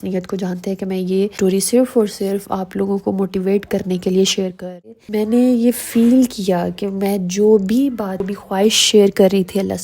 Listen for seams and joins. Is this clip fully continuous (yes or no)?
no